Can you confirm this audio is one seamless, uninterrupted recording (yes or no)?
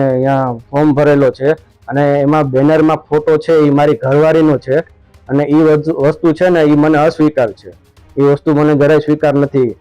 yes